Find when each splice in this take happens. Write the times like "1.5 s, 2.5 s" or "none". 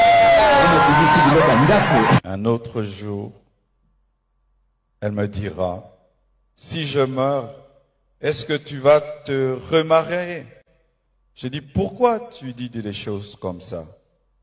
2.2 s

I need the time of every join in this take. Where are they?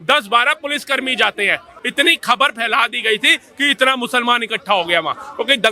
1.7 s

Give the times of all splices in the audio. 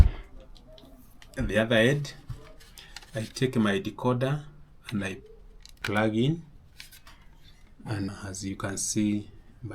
5.8 s, 8.1 s

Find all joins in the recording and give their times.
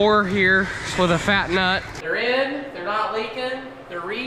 1.9 s

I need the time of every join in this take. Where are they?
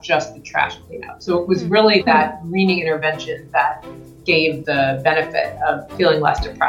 4.6 s, 5.9 s

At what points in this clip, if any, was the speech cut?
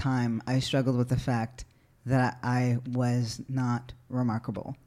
none

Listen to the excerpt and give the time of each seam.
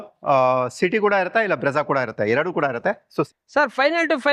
3.3 s

